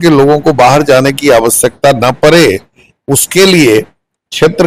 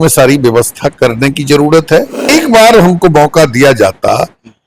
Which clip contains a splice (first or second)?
second